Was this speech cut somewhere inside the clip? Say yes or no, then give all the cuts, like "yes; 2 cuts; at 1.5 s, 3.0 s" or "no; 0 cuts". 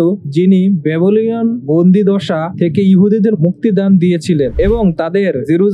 no; 0 cuts